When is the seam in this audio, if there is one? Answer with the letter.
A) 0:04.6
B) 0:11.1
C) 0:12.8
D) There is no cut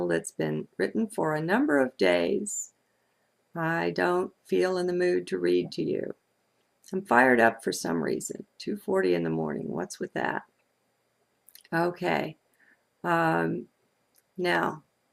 A